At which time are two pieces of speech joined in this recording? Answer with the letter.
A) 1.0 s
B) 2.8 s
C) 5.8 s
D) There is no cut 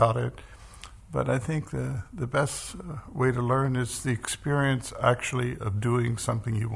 D